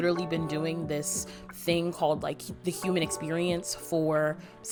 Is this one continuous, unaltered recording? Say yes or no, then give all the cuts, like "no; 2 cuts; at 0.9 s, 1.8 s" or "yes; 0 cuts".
yes; 0 cuts